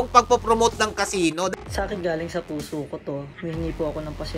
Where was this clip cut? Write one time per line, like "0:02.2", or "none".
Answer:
0:01.5
0:03.3

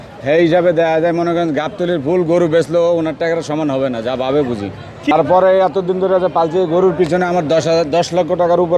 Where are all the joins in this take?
0:05.1

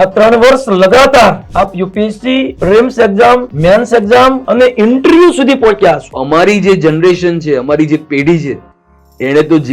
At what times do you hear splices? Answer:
0:01.4
0:02.5
0:03.5
0:04.4
0:06.2

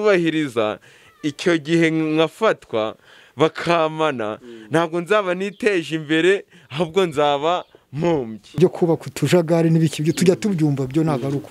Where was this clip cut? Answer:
0:08.6

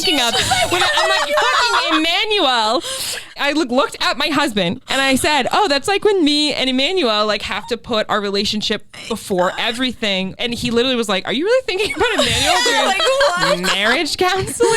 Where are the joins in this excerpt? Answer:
0:03.4
0:04.8
0:10.4

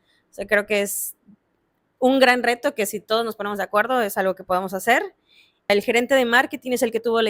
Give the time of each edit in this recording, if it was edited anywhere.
0:05.7

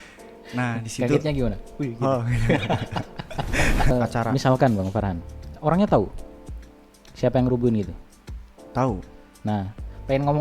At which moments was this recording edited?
0:03.9

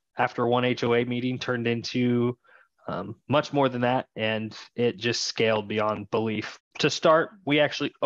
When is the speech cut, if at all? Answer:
0:06.5

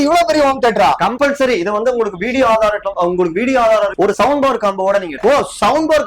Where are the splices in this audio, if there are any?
0:03.9

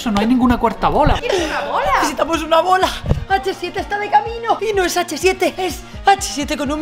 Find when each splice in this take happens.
0:01.2
0:04.6
0:05.6

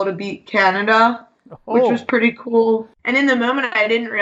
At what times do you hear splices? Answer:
0:03.0

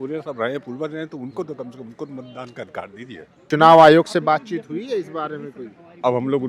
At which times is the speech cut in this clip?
0:03.5

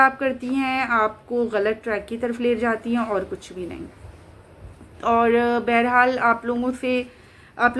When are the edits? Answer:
none

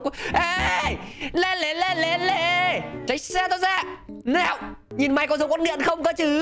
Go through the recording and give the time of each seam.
0:03.0
0:04.8

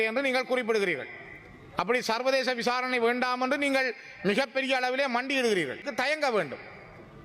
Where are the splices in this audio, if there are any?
0:05.9

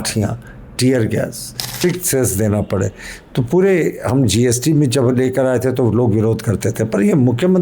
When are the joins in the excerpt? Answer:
0:01.8

